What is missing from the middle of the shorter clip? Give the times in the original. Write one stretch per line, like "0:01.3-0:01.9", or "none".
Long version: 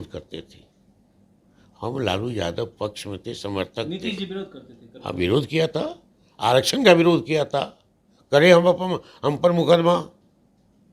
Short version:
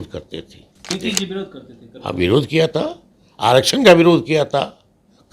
0:00.9-0:03.9